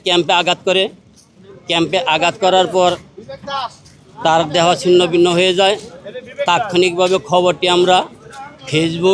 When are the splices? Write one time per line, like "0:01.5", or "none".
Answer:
none